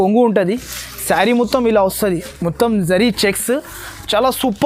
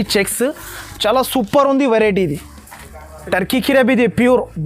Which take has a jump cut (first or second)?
second